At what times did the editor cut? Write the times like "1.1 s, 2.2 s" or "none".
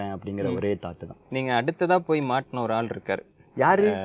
none